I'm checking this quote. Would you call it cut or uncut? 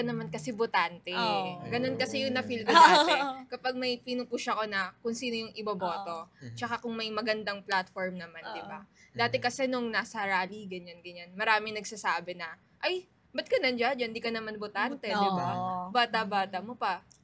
uncut